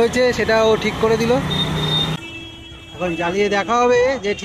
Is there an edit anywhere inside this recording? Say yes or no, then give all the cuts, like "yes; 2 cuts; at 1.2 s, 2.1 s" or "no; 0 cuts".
yes; 1 cut; at 2.2 s